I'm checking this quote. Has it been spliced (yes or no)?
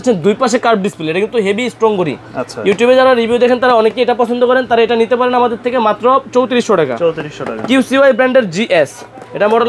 no